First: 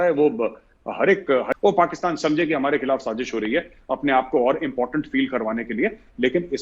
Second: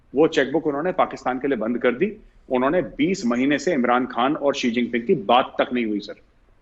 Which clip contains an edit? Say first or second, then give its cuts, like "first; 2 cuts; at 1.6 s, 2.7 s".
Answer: first; 1 cut; at 1.5 s